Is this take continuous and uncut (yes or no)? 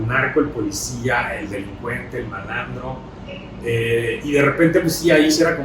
yes